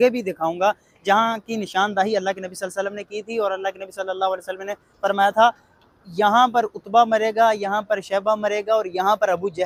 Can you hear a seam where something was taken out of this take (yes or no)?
no